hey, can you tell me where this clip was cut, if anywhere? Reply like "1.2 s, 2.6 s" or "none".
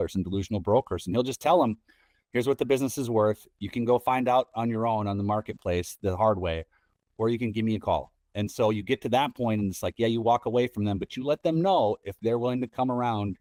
none